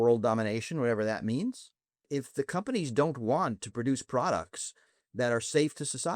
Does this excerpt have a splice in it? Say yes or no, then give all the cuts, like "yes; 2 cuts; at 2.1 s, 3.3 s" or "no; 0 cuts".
yes; 1 cut; at 2.1 s